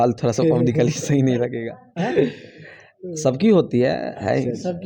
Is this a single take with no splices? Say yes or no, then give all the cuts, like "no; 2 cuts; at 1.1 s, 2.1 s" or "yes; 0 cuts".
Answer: yes; 0 cuts